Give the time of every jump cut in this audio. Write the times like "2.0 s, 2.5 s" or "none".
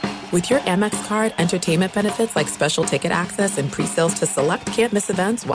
none